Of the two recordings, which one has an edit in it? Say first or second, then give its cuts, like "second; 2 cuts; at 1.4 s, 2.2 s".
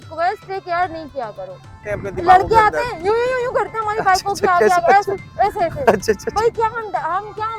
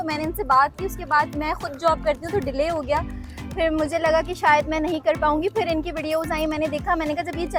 first; 1 cut; at 1.8 s